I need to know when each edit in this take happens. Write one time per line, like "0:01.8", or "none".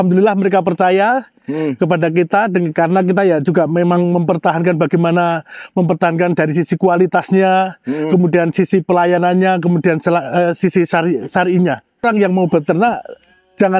0:12.0

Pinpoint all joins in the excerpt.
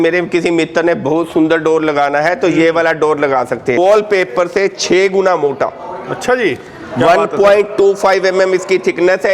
0:03.8

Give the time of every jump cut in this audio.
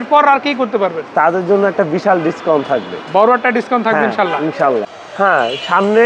0:04.9

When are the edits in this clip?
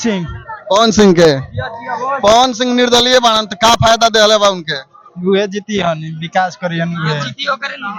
none

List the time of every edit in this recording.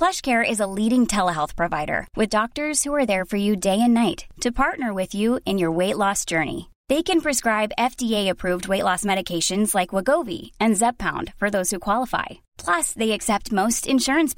none

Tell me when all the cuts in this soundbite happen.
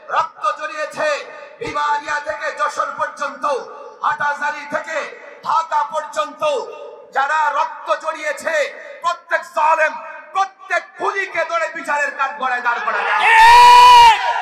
none

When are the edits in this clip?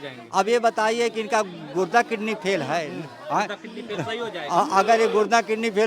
none

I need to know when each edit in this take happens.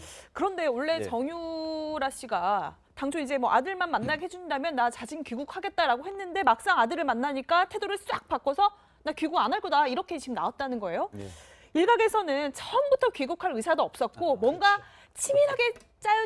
0:12.1

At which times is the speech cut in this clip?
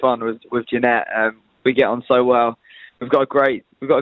none

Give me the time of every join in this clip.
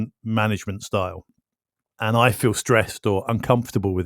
0:01.9

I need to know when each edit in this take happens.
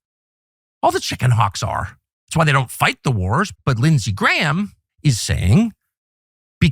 0:03.5
0:04.8

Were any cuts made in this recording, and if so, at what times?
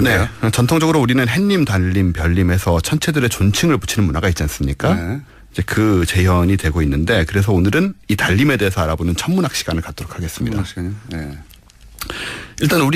none

